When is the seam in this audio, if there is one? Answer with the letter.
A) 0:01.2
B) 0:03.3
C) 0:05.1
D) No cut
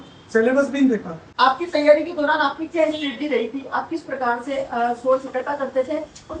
A